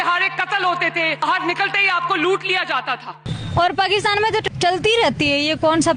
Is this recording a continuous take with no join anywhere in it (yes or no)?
no